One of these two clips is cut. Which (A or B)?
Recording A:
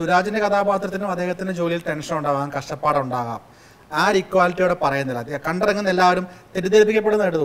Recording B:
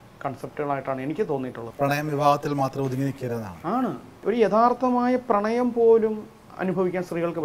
B